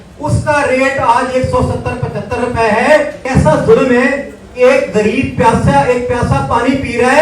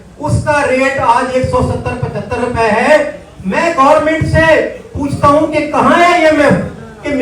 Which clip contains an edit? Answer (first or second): first